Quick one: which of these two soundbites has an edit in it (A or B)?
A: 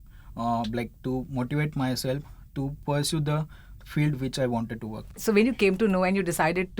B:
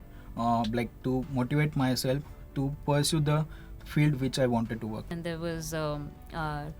B